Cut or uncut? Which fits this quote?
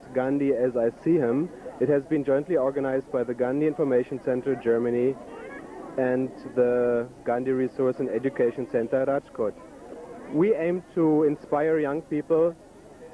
cut